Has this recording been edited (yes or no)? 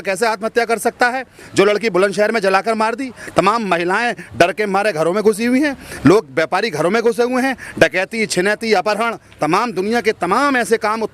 no